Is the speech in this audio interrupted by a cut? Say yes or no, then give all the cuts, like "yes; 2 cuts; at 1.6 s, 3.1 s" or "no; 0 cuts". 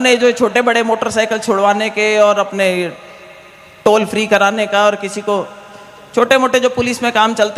no; 0 cuts